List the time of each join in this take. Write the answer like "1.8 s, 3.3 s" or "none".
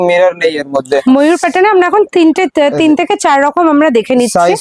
1.0 s

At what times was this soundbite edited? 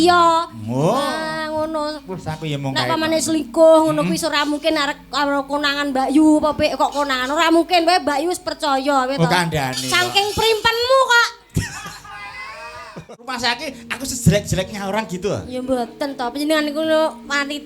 13.3 s

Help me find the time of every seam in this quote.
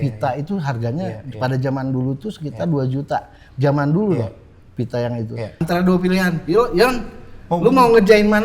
5.6 s

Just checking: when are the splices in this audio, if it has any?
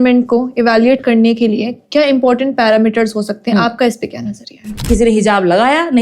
4.8 s

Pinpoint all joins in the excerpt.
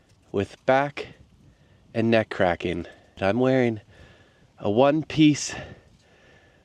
3.2 s

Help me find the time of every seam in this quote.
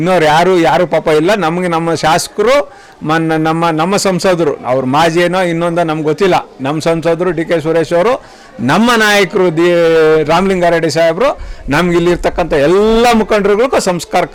none

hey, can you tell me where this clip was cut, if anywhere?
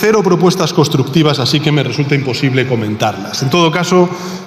none

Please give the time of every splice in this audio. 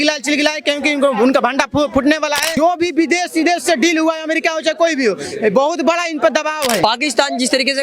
2.5 s, 6.8 s

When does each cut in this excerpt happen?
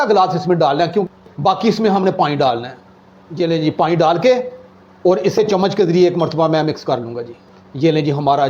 1.0 s

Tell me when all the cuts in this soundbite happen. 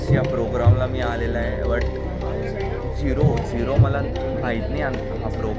none

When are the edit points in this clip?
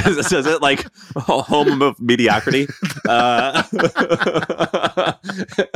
none

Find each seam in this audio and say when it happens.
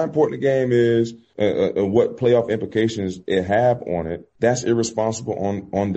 1.2 s, 4.2 s

